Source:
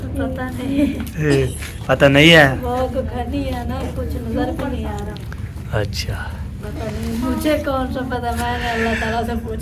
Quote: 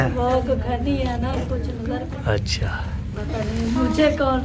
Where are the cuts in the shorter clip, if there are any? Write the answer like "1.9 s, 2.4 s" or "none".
2.1 s